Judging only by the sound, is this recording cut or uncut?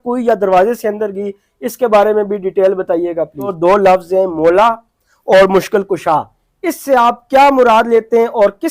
cut